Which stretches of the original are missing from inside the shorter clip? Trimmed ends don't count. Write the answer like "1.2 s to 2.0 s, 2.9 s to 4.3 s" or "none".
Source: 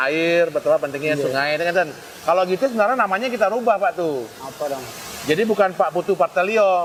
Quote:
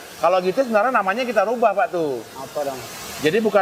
none